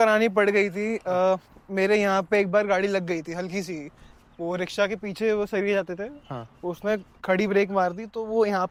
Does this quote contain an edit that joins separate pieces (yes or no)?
no